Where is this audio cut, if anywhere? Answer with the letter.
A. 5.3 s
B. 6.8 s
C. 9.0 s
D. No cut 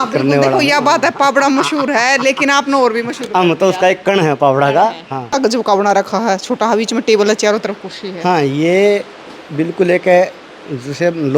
A